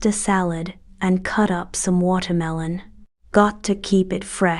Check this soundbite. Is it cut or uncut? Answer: cut